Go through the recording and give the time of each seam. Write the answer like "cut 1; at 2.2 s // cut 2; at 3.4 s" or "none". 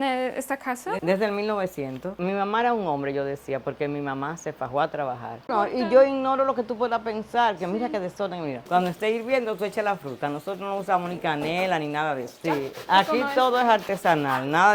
cut 1; at 2.1 s // cut 2; at 5.5 s // cut 3; at 8.6 s // cut 4; at 12.5 s